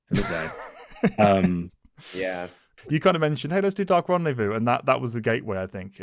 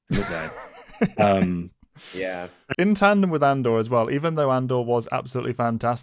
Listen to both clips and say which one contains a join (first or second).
first